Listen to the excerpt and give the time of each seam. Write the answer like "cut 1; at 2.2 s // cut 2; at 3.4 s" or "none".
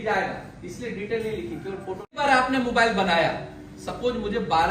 cut 1; at 2.1 s